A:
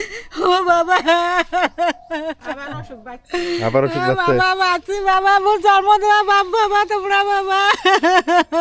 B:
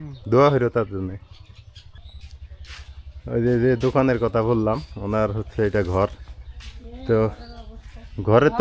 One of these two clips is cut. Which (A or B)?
B